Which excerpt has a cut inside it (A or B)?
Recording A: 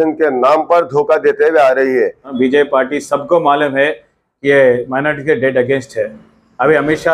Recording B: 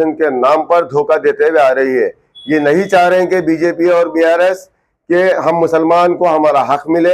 A